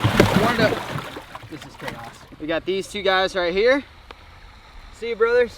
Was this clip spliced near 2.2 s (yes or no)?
yes